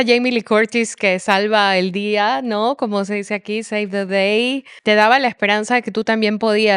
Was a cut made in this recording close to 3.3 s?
no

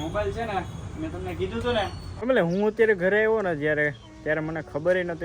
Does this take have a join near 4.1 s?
no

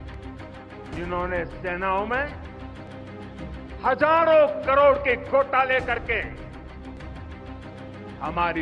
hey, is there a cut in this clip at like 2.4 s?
no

